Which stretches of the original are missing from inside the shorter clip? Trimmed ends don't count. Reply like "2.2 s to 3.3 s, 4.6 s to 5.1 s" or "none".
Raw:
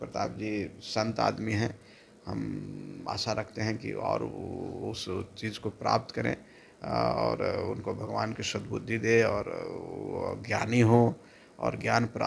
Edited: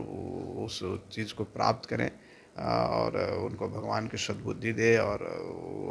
none